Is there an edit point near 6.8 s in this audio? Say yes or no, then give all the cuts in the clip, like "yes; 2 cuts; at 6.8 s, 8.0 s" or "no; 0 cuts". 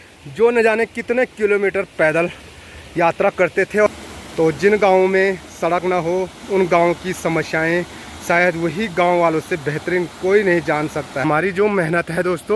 no; 2 cuts; at 3.9 s, 11.2 s